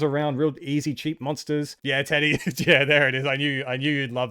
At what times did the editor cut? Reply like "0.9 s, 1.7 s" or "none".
1.7 s